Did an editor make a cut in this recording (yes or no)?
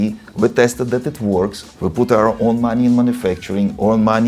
no